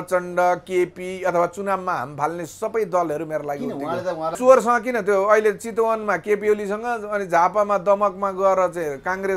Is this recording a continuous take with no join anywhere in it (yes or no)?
no